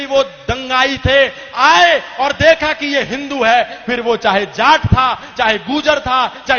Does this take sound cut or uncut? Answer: uncut